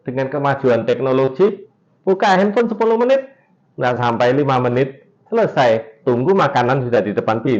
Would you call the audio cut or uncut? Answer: uncut